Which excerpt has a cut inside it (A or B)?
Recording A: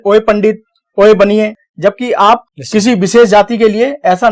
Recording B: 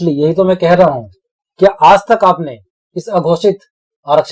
A